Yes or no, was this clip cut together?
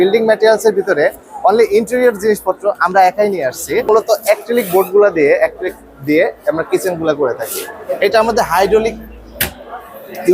yes